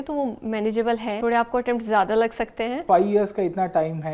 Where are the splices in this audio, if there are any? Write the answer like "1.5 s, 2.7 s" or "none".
1.2 s, 2.8 s